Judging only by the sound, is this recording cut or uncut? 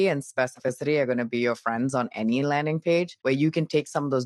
cut